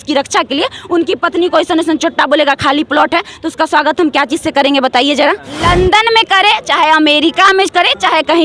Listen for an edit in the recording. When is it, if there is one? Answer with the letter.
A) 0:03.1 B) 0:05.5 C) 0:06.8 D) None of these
B